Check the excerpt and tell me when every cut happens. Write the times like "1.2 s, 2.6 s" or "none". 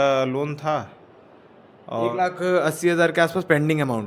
none